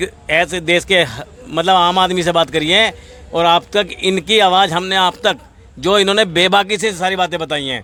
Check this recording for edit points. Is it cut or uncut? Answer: uncut